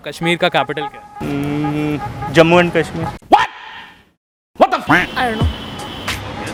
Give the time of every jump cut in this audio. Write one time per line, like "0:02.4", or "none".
none